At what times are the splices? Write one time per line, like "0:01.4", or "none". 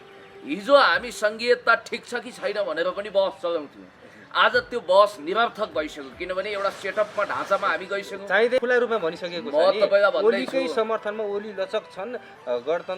0:08.6

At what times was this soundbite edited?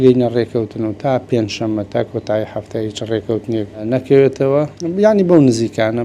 0:03.8
0:04.8

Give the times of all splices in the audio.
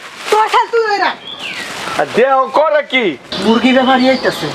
0:03.3

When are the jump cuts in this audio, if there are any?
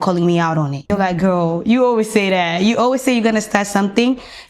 0:00.9

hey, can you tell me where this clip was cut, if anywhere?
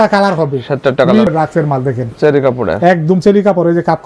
0:01.3

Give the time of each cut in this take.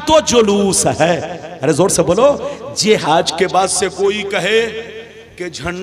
0:03.0

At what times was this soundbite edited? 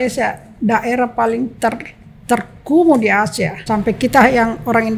0:03.6

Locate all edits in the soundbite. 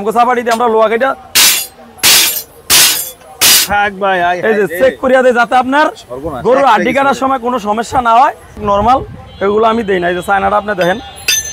0:08.6

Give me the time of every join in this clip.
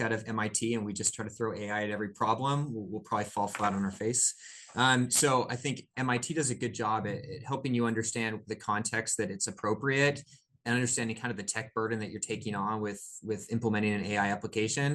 none

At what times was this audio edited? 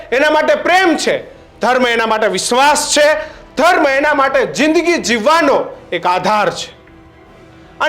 none

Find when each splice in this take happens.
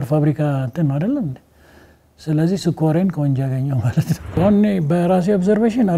0:04.4

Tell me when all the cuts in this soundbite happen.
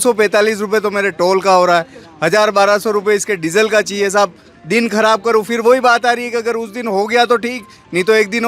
none

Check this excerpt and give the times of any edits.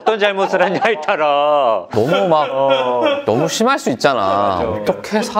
none

